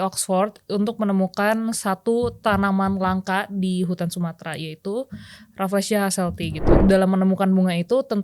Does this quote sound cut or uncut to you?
cut